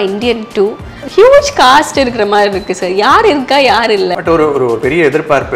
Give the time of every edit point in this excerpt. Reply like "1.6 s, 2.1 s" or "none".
none